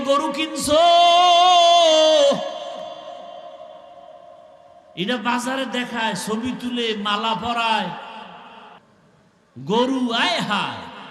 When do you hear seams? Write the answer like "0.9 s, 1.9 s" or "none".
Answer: 8.8 s

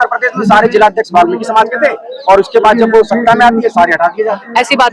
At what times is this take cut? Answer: none

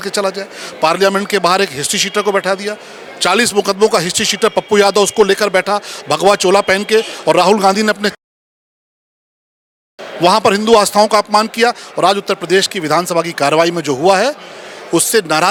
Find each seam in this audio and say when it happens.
none

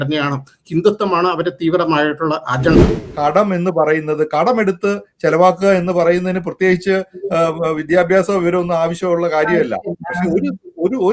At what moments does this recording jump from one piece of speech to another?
2.8 s

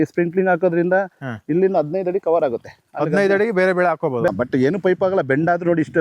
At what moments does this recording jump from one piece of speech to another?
4.3 s

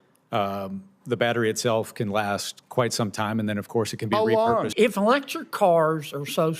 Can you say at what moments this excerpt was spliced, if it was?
4.7 s

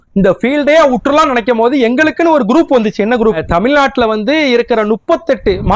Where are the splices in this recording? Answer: 3.4 s

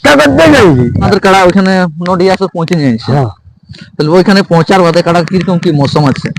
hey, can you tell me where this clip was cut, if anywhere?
1.1 s

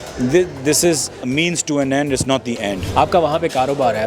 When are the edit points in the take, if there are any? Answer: 1.2 s, 2.8 s

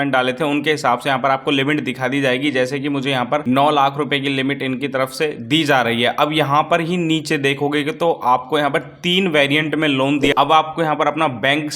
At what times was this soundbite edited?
10.3 s

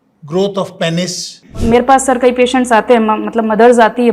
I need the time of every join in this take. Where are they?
1.5 s

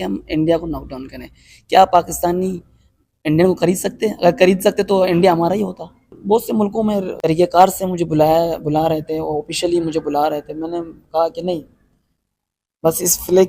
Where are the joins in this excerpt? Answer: 6.1 s, 7.1 s

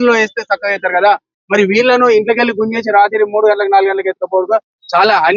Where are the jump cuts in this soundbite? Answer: none

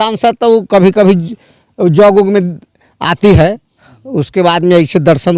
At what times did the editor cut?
none

